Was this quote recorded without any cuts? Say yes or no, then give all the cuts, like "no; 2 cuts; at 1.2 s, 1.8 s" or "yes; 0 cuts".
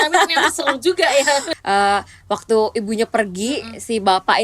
no; 1 cut; at 1.5 s